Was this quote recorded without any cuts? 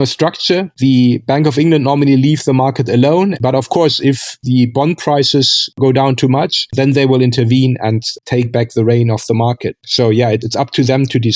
no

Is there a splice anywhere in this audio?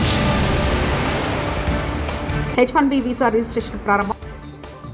yes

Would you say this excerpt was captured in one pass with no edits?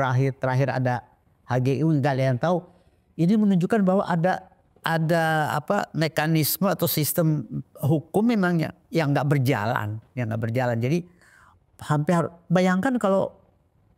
yes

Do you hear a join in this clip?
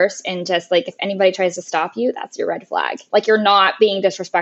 yes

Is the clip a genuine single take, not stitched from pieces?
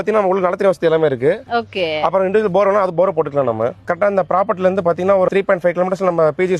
no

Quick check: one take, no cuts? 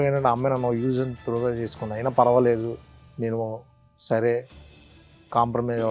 yes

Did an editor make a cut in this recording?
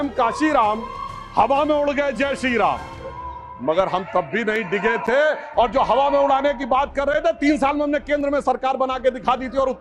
no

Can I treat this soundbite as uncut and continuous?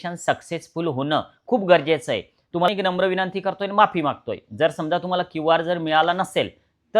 no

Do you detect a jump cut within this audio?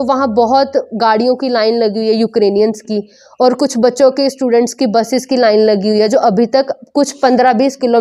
no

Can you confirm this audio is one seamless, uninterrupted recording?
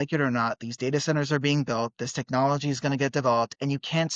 yes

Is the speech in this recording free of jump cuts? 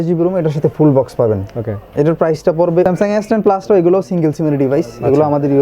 no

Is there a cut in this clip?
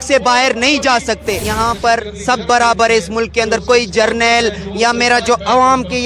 yes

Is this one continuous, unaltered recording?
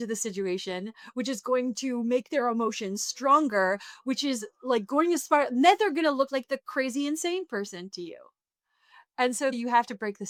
yes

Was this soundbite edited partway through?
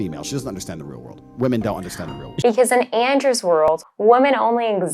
yes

